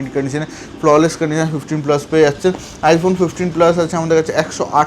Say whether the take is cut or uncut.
uncut